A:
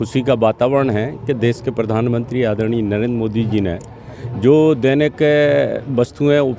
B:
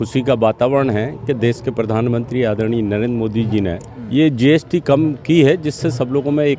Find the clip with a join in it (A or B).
B